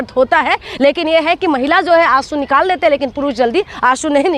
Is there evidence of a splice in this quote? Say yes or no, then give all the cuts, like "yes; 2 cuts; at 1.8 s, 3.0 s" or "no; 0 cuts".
no; 0 cuts